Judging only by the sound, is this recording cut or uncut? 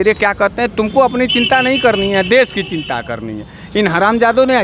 uncut